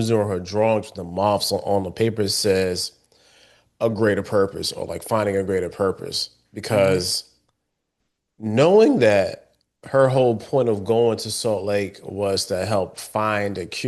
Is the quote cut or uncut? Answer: uncut